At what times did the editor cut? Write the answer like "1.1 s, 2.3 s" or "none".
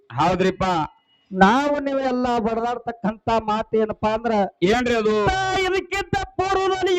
5.2 s